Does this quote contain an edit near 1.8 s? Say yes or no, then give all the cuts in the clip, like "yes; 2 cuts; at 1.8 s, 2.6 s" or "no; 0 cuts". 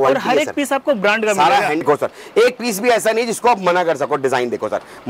yes; 1 cut; at 1.8 s